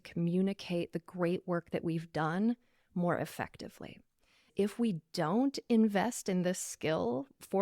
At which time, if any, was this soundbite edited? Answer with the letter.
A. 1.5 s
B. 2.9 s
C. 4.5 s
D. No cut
C